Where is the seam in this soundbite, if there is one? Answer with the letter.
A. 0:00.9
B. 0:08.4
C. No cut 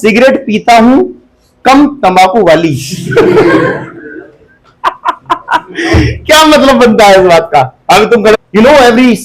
B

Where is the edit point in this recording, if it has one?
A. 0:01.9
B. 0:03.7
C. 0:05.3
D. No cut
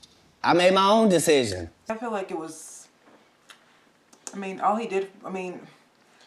A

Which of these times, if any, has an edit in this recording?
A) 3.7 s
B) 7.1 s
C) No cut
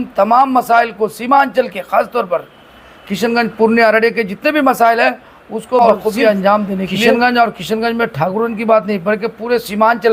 B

